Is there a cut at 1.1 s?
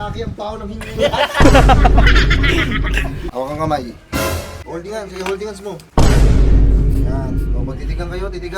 no; 2 cuts; at 3.2 s, 4.6 s

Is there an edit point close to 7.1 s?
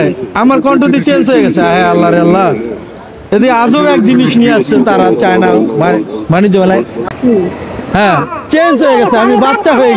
yes; 1 cut; at 7.1 s

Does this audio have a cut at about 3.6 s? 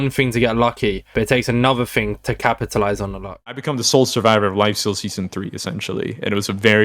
yes; 1 cut; at 3.6 s

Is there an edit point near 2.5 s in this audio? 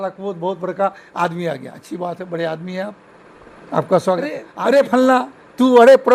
no; 1 cut; at 4.5 s

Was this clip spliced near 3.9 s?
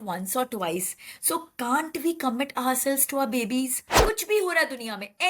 yes; 1 cut; at 3.9 s

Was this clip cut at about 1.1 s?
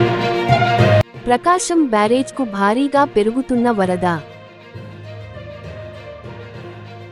no; 0 cuts

